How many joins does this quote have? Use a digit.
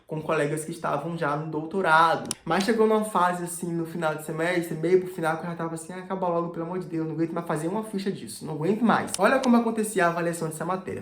2